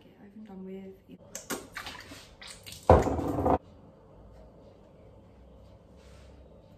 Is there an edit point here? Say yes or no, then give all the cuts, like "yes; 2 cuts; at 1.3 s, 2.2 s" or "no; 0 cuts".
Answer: yes; 2 cuts; at 1.2 s, 3.5 s